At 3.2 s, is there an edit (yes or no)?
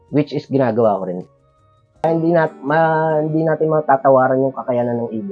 no